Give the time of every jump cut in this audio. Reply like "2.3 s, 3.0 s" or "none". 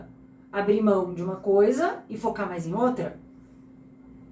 none